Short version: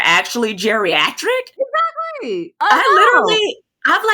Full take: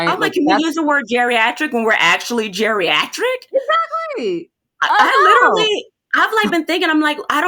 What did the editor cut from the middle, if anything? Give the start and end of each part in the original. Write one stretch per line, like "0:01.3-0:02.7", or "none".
0:04.5-0:04.9